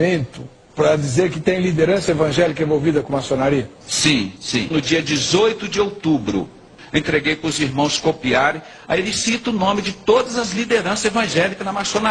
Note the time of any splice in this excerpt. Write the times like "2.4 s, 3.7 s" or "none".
6.8 s

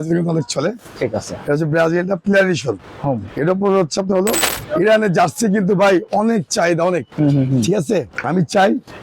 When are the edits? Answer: 4.5 s, 8.2 s

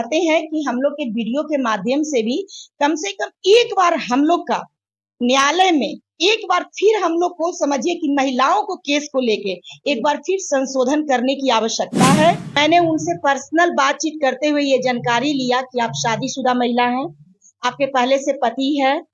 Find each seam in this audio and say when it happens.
12.6 s

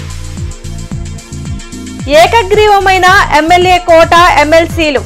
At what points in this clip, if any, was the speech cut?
none

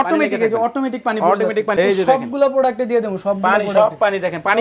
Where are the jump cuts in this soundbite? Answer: 1.7 s

